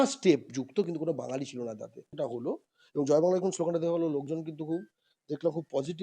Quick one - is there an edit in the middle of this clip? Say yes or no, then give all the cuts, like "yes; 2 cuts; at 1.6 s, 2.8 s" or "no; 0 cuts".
yes; 1 cut; at 2.1 s